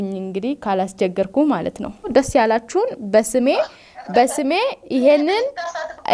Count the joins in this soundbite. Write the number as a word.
one